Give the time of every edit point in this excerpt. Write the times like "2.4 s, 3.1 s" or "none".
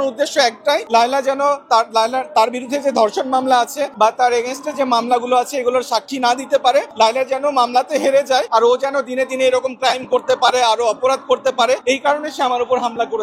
0.8 s, 3.8 s, 6.9 s, 8.5 s, 11.8 s